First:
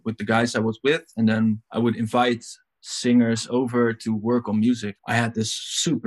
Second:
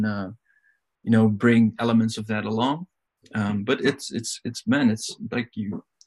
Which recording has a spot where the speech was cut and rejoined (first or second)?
first